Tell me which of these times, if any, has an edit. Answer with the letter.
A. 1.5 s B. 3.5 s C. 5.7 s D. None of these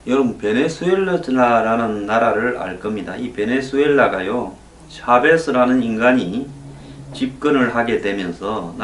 D